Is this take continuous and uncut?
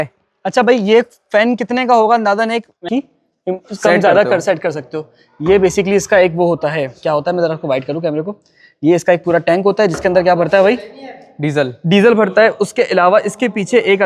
no; 1 cut; at 2.8 s

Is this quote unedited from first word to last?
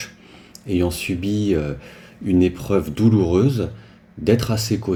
yes; 0 cuts

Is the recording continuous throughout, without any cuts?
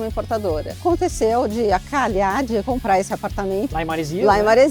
no; 3 cuts; at 0.8 s, 2.6 s, 3.7 s

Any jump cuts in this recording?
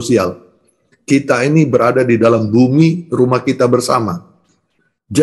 no; 0 cuts

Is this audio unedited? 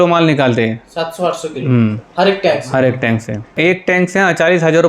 no; 1 cut; at 3.5 s

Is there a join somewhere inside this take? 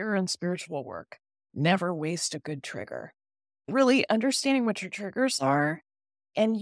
no; 0 cuts

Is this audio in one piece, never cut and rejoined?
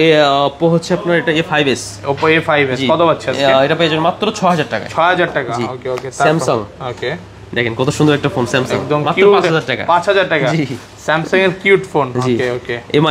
yes; 0 cuts

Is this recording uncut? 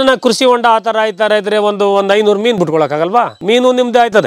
yes; 0 cuts

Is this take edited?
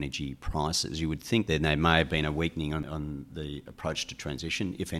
yes; 2 cuts; at 1.5 s, 2.8 s

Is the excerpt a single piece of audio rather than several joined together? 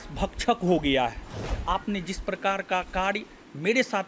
no; 1 cut; at 1.5 s

